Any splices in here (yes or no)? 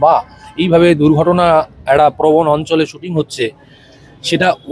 no